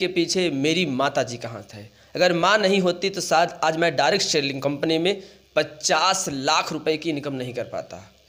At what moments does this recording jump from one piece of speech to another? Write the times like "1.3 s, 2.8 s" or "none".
none